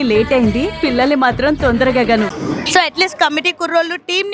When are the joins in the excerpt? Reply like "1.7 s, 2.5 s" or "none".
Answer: 2.3 s